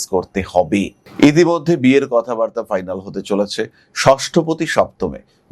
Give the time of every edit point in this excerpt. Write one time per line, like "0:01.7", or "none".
0:01.0

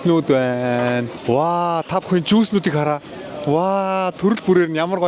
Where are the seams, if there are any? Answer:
none

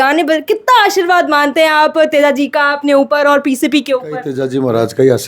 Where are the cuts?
0:04.4

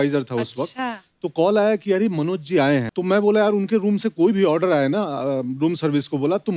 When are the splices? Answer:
0:02.9

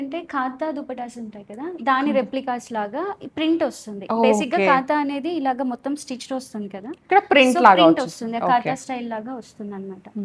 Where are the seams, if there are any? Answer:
none

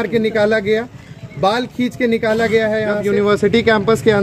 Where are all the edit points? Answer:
0:03.0

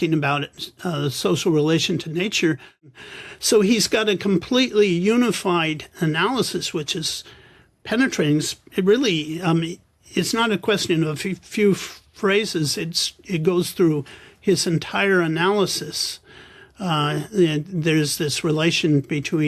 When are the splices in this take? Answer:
0:02.9

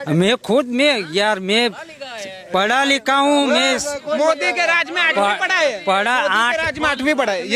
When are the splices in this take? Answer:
none

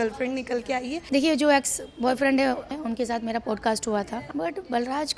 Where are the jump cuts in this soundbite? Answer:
0:01.0
0:02.7
0:04.2

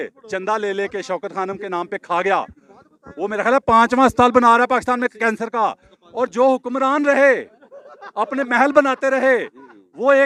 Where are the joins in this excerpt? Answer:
none

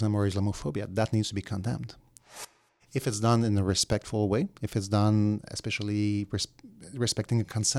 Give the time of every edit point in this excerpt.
0:02.3

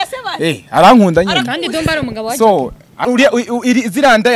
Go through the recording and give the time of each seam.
0:03.1

